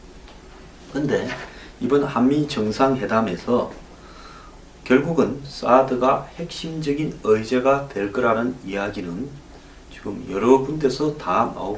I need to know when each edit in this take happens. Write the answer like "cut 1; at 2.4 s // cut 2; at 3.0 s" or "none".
cut 1; at 7.2 s